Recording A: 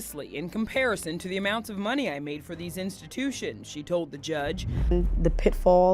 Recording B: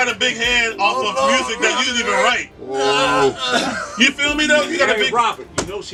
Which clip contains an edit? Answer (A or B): A